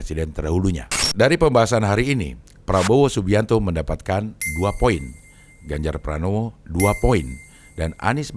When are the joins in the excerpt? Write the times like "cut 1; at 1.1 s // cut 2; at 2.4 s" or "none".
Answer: cut 1; at 0.9 s